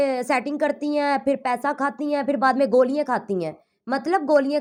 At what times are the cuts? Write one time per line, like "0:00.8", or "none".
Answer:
none